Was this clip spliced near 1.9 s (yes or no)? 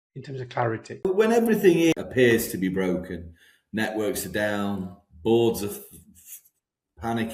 yes